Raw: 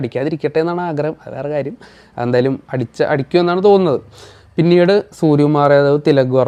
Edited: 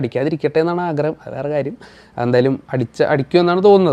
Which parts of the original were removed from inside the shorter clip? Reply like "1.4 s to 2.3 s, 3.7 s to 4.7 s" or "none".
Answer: none